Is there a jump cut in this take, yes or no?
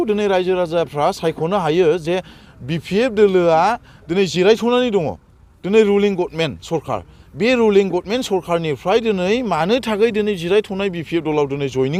no